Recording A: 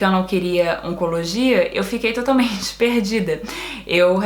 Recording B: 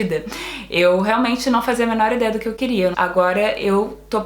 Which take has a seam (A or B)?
B